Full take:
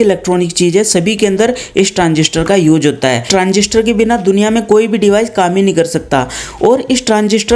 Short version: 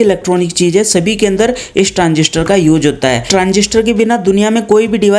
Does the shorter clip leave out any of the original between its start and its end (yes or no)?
no